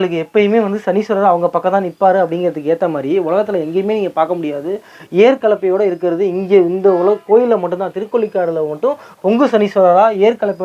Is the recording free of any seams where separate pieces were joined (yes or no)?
yes